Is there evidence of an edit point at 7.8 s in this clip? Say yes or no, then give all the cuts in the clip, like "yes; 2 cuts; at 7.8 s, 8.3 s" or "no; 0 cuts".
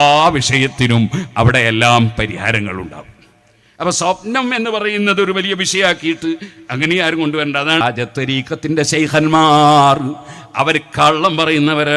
yes; 1 cut; at 7.8 s